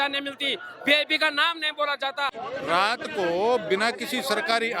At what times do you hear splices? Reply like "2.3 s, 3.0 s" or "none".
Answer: 2.4 s

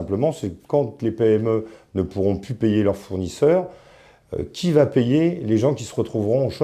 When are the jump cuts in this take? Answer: none

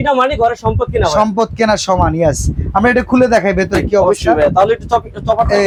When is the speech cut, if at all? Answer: none

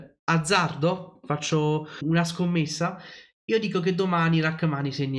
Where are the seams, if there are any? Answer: 2.0 s

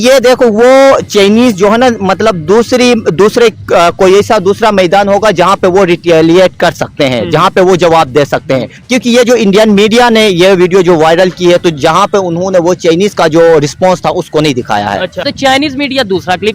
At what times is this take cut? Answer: 8.8 s, 15.3 s

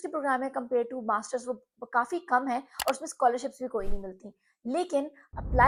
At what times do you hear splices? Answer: none

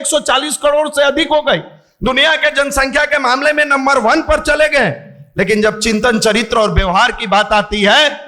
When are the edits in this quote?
none

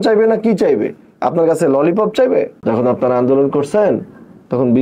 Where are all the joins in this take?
2.5 s

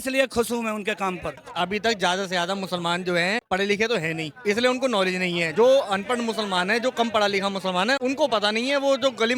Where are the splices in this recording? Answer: 1.5 s, 3.4 s, 5.5 s, 8.0 s

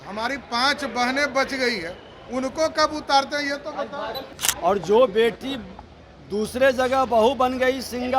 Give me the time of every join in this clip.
4.4 s

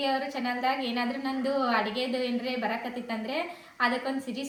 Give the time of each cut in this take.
none

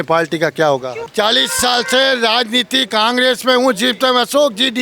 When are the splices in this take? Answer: 1.0 s

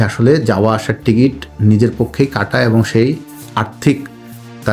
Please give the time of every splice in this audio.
none

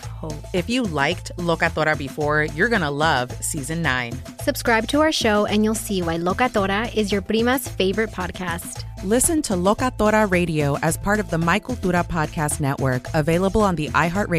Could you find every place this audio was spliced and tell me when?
none

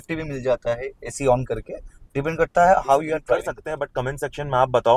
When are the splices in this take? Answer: 3.6 s

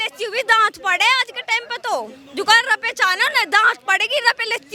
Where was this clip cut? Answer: none

